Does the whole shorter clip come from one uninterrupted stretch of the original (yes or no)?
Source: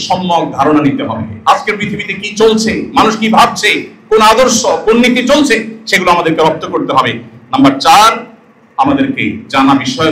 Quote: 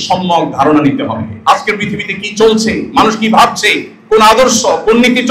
yes